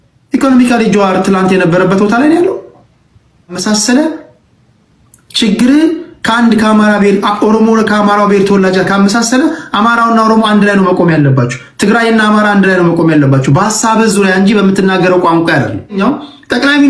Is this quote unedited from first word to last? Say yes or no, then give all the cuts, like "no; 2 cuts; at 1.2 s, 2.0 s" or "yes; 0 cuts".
no; 2 cuts; at 3.6 s, 16.0 s